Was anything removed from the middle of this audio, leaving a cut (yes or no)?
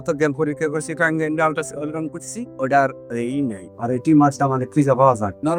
no